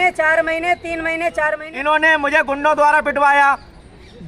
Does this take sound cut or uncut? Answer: cut